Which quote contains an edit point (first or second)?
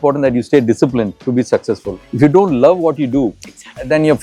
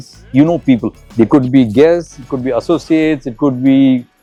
first